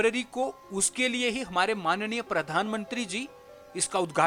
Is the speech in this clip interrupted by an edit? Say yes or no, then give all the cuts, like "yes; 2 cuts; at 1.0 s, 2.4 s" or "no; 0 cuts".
no; 0 cuts